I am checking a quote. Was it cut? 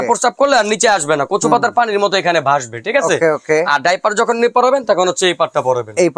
no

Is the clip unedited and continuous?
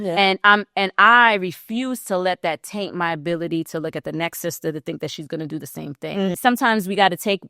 no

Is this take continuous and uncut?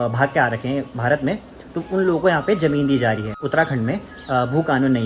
no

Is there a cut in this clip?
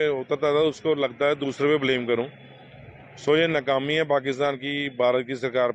no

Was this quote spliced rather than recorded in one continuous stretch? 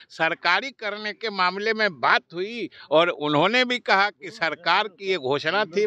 no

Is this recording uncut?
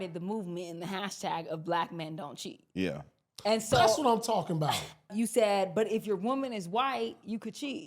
no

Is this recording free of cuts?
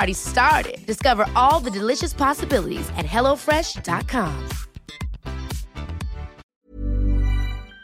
no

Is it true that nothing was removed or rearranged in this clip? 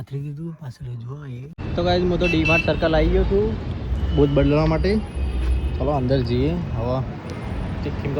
no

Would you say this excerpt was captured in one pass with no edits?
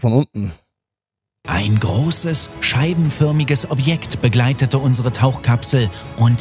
no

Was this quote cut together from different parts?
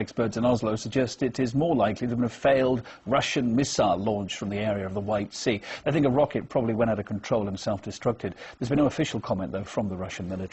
yes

